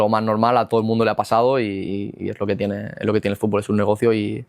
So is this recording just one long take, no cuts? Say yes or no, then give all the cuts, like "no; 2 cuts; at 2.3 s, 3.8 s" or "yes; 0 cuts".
yes; 0 cuts